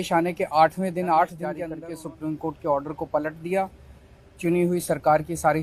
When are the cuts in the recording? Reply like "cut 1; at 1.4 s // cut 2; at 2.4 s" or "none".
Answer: cut 1; at 1.7 s